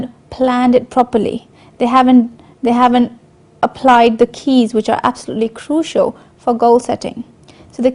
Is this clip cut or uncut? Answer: cut